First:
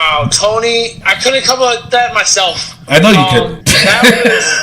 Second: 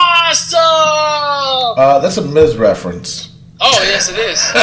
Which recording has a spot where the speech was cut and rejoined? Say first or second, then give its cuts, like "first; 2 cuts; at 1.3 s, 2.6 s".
first; 2 cuts; at 1.0 s, 3.6 s